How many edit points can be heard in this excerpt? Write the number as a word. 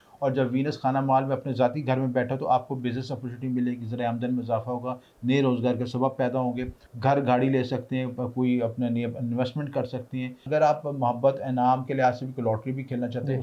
two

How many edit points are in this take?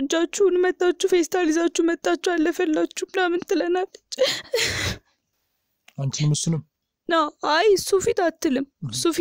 zero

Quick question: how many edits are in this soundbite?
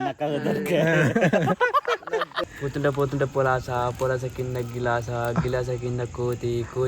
one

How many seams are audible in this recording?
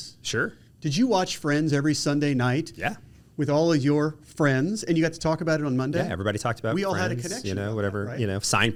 zero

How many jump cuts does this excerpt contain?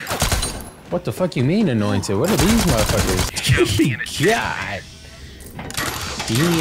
one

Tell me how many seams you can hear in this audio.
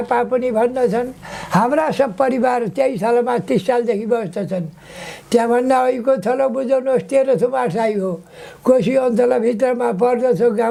zero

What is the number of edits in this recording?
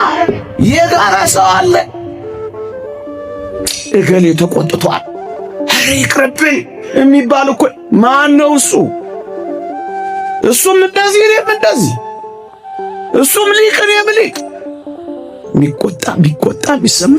three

